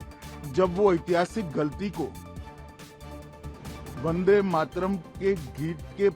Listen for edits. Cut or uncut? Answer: cut